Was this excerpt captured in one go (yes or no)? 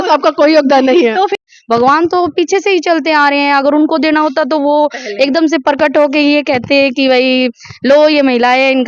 no